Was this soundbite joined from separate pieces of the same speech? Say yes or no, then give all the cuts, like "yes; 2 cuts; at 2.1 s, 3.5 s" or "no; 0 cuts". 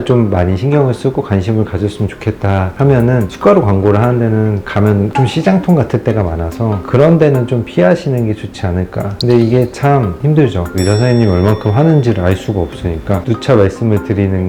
no; 0 cuts